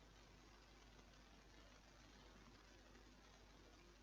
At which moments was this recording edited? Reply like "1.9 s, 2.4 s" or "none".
1.1 s